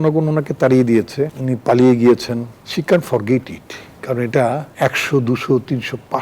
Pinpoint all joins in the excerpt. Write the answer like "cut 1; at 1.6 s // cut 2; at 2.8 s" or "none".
cut 1; at 1.4 s // cut 2; at 2.6 s // cut 3; at 4.7 s